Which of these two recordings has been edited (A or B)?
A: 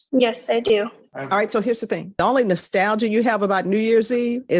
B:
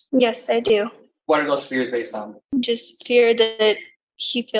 A